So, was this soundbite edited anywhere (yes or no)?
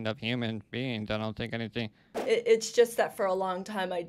yes